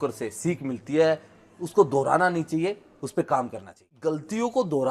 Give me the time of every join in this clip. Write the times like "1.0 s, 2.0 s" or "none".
4.0 s